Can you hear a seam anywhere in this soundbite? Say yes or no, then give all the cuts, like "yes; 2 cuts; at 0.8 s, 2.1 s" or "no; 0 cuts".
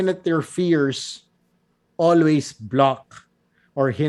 no; 0 cuts